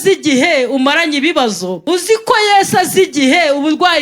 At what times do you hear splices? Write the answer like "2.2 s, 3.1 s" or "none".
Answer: 1.7 s